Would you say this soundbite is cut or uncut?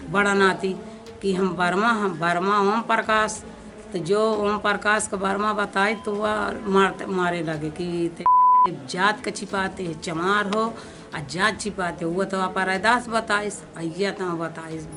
uncut